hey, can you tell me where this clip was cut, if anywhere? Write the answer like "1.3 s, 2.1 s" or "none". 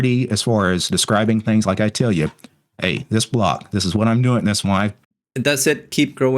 5.0 s